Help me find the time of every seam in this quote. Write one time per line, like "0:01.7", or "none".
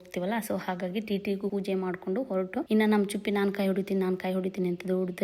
0:01.5
0:02.7